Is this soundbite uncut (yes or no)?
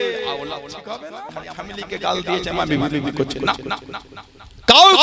no